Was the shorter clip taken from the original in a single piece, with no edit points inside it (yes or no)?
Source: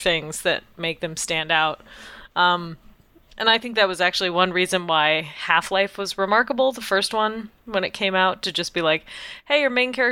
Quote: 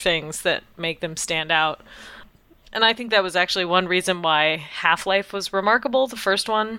no